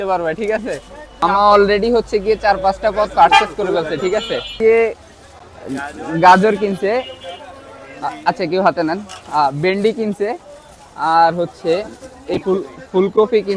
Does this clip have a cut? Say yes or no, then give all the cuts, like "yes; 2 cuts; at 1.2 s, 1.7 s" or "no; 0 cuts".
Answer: yes; 2 cuts; at 1.2 s, 4.6 s